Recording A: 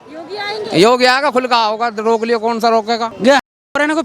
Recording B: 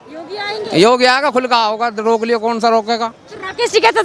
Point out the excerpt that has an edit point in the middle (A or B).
A